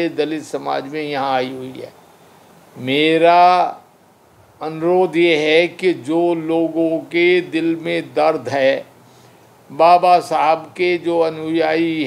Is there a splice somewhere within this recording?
no; 0 cuts

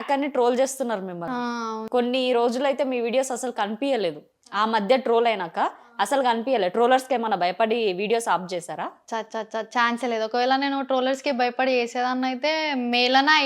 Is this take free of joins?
yes; 0 cuts

